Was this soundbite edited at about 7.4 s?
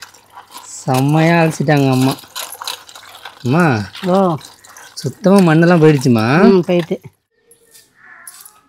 yes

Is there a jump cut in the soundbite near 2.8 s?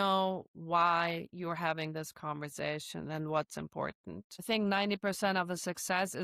no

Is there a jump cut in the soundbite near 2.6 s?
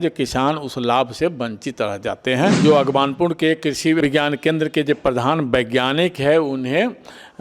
yes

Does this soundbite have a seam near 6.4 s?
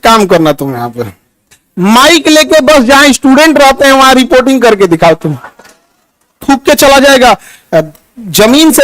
yes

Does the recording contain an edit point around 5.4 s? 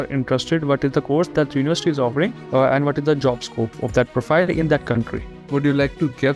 yes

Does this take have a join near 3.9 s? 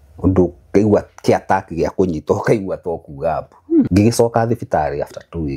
yes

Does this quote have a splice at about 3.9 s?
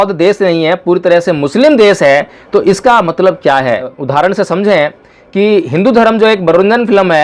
yes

